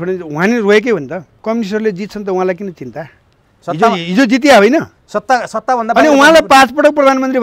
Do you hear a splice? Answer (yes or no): yes